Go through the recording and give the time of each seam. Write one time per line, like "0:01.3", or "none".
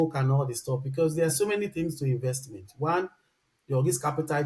none